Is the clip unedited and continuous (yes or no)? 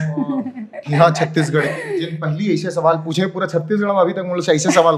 yes